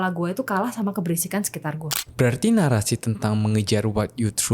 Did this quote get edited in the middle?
yes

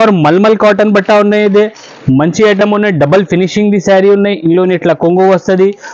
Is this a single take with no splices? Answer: yes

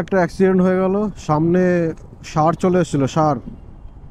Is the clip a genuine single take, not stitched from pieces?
yes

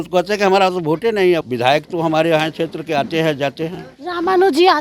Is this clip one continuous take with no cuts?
no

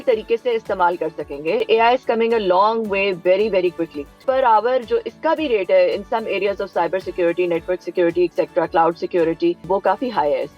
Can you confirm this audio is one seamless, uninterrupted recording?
no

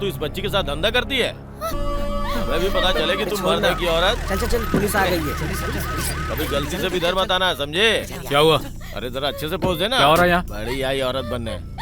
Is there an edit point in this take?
yes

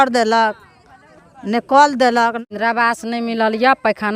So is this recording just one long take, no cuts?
no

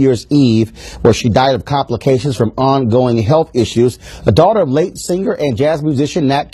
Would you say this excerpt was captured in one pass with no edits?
no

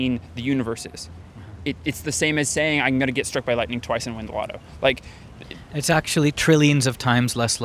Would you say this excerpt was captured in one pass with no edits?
yes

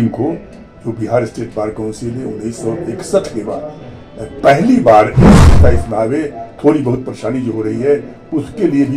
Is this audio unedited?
no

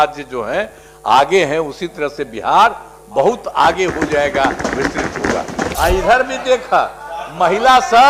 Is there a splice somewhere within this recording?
yes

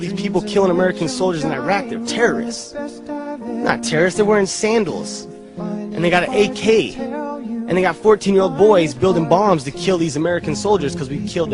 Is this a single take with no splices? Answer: no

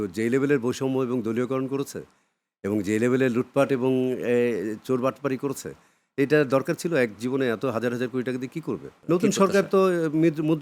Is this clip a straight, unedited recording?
no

